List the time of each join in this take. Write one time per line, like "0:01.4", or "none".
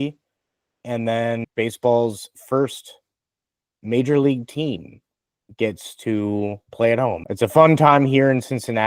0:01.4
0:07.2